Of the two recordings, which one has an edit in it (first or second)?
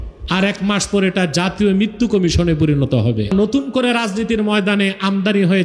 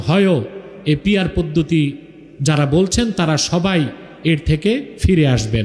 first